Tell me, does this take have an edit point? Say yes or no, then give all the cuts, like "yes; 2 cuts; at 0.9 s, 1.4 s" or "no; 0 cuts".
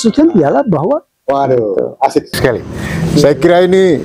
yes; 1 cut; at 1.1 s